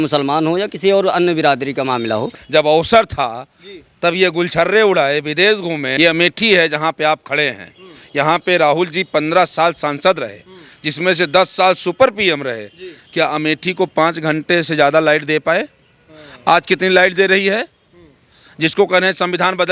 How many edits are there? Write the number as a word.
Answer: two